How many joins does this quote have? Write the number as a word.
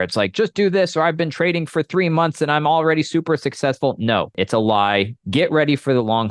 two